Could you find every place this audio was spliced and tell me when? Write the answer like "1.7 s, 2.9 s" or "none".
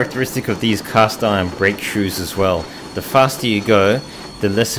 none